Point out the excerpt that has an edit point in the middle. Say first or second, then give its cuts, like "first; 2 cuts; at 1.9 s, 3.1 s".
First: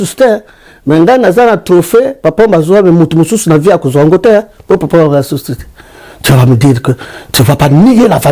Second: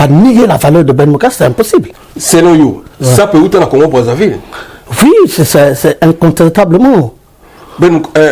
second; 1 cut; at 2.0 s